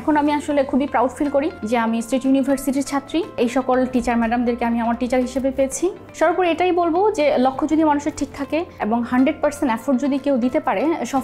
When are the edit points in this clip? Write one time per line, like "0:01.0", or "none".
0:01.6
0:03.3
0:06.0
0:08.7